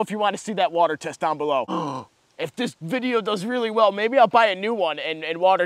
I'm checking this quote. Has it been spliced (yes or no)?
yes